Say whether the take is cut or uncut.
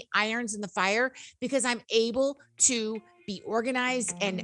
uncut